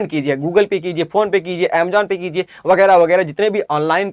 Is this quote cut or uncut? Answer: uncut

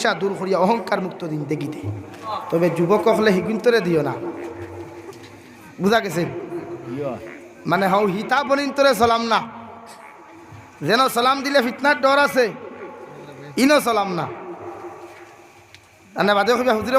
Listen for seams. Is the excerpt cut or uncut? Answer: cut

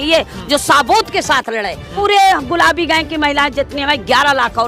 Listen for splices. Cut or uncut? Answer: cut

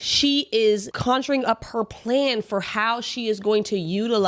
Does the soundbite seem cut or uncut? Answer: cut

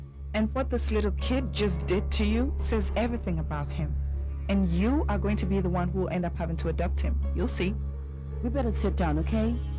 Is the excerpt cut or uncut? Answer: uncut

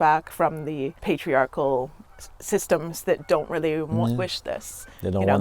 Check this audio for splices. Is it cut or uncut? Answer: cut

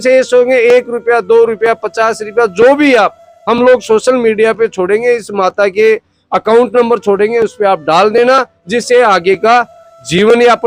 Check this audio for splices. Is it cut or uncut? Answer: uncut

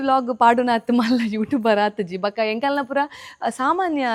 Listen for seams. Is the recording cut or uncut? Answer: uncut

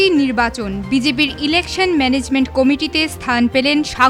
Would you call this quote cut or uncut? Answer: uncut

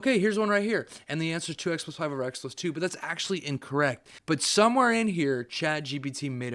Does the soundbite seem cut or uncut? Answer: cut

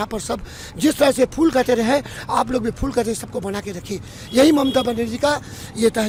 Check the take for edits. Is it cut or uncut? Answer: uncut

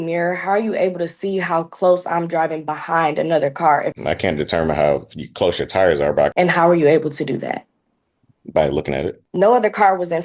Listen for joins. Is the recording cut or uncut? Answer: cut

